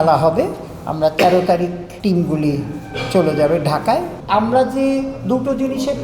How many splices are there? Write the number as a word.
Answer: two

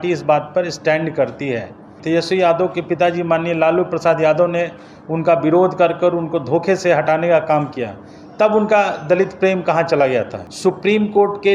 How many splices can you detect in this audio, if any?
two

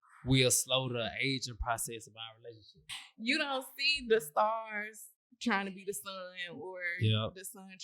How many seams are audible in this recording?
one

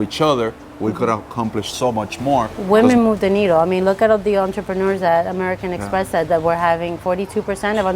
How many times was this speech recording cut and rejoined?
one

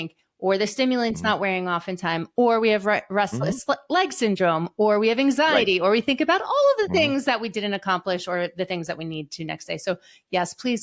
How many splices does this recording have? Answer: zero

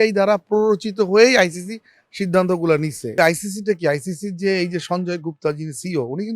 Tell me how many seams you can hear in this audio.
one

